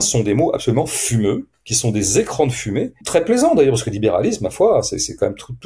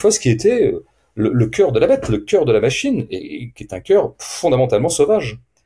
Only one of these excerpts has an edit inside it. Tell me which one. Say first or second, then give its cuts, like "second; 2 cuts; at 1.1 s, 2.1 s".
first; 1 cut; at 3.0 s